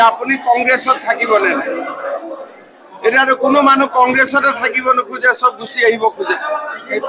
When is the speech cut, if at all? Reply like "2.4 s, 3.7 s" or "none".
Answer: none